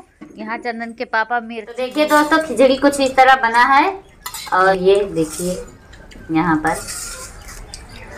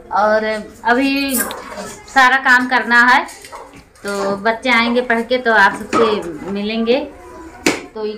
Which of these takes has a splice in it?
first; 2 cuts; at 1.9 s, 4.8 s

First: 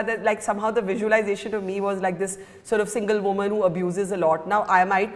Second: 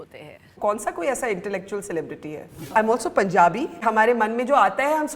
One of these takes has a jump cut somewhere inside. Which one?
second; 2 cuts; at 2.7 s, 3.8 s

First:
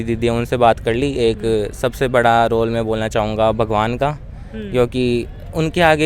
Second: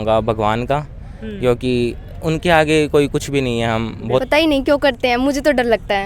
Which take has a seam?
second; 1 cut; at 4.2 s

